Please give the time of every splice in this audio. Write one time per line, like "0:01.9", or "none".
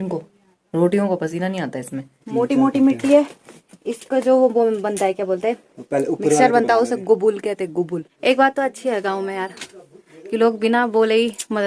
0:02.2
0:08.0